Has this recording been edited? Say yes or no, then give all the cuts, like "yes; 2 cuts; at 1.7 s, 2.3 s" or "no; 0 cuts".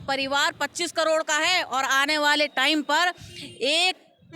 no; 0 cuts